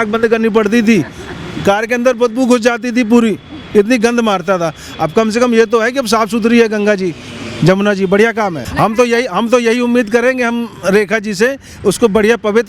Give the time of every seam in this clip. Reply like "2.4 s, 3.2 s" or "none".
8.6 s